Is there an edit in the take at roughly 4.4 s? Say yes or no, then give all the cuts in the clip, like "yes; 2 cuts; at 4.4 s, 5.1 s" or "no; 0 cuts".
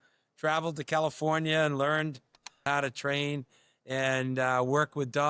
no; 1 cut; at 2.6 s